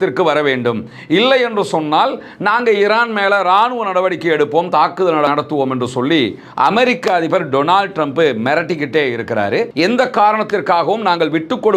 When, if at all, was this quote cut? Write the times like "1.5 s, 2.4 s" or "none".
5.3 s, 9.7 s